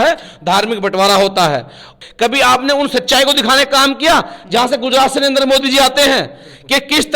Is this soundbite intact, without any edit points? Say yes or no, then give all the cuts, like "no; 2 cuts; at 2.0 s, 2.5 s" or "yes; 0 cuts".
no; 1 cut; at 1.9 s